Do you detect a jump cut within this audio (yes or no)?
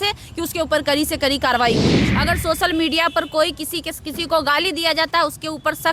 yes